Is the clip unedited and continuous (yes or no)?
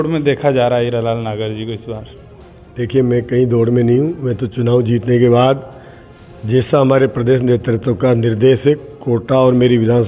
yes